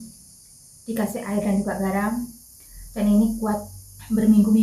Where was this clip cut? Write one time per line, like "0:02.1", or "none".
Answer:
none